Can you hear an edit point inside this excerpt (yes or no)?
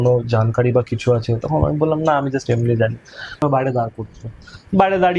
yes